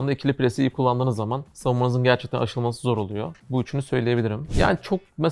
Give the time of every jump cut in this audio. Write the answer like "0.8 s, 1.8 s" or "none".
1.5 s, 3.4 s, 4.4 s